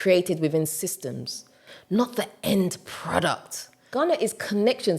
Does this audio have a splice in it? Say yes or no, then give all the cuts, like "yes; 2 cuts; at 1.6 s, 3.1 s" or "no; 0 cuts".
yes; 1 cut; at 3.9 s